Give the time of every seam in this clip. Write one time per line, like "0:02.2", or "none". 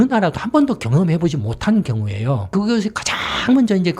0:02.5